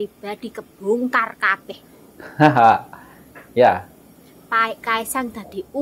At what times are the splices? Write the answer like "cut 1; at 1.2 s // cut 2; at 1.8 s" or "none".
none